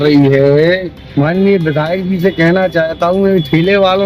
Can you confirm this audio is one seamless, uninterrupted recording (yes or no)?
no